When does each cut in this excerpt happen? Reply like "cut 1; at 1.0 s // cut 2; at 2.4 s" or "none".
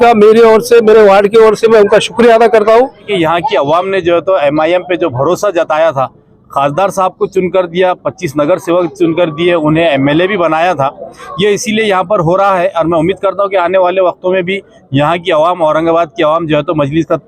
cut 1; at 3.1 s